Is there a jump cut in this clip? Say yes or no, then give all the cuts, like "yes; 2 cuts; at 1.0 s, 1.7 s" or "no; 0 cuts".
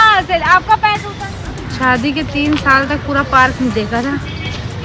yes; 1 cut; at 1.2 s